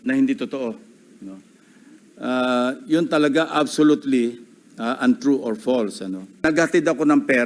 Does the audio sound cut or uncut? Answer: cut